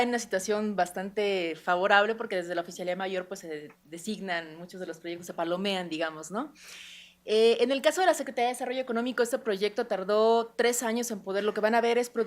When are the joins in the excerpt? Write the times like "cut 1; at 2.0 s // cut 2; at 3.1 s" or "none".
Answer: cut 1; at 2.9 s